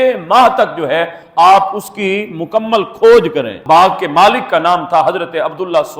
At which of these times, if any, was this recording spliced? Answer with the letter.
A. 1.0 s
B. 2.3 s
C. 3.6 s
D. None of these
C